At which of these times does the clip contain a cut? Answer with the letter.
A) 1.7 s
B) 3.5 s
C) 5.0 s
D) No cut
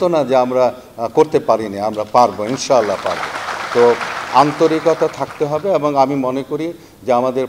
D